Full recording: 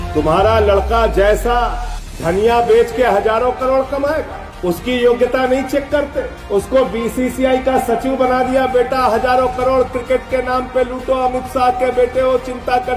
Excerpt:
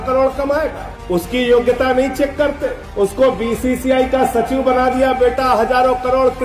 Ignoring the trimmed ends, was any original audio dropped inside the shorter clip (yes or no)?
no